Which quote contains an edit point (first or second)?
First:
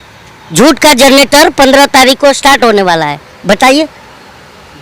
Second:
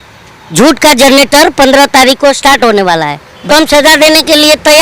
second